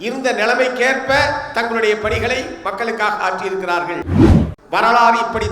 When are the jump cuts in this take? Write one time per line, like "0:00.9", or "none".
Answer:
0:04.4

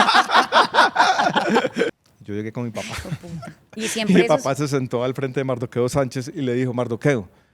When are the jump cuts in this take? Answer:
0:01.9

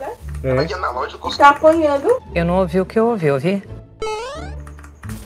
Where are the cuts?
none

